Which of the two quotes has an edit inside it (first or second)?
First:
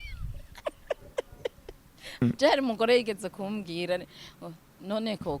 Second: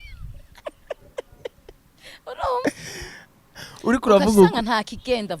first